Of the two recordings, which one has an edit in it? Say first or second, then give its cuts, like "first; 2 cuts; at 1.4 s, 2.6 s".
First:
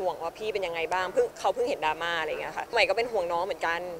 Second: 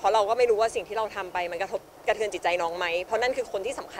first; 1 cut; at 2.7 s